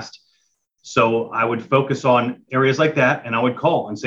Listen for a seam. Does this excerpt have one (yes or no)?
no